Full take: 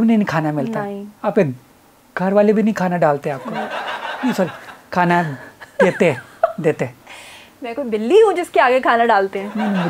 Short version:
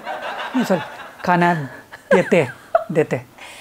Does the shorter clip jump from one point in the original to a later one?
no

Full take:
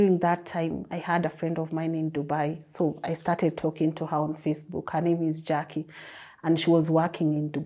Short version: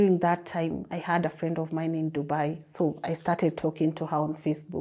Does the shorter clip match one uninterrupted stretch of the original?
yes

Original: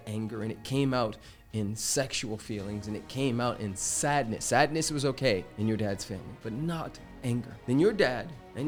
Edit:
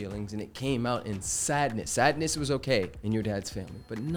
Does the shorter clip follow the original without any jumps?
yes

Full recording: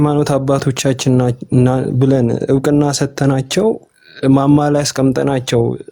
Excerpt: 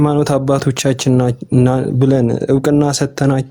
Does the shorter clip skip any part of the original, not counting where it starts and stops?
no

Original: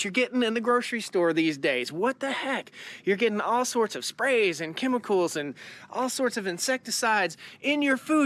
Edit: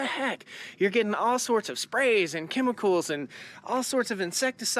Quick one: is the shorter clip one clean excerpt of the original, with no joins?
yes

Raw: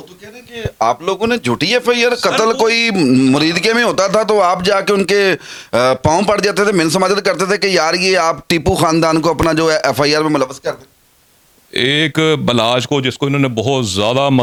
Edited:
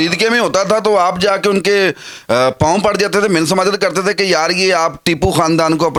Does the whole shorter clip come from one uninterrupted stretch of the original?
yes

